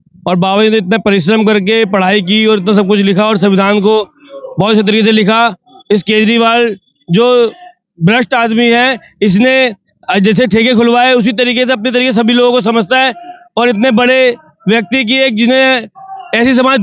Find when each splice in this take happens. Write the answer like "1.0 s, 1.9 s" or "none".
none